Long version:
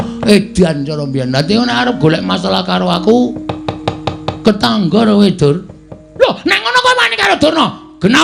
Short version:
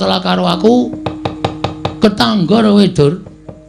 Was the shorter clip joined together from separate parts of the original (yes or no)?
no